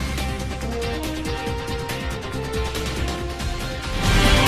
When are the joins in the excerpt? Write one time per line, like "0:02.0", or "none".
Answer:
none